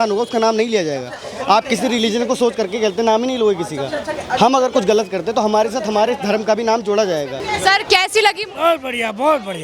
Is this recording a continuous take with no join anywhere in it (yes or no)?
no